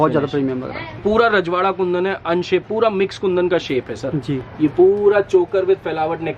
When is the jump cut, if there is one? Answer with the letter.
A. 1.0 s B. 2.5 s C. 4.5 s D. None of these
A